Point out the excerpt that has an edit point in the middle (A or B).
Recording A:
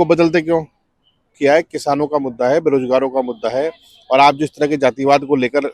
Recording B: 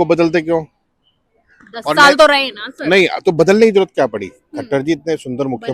A